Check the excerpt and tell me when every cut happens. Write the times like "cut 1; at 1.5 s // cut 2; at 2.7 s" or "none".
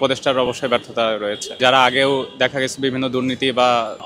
cut 1; at 1.6 s